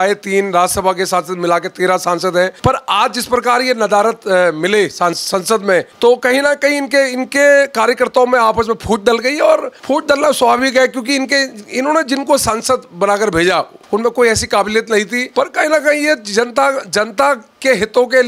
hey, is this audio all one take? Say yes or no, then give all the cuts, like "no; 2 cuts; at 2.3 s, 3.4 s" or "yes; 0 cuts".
no; 5 cuts; at 2.5 s, 5.9 s, 9.7 s, 13.8 s, 15.2 s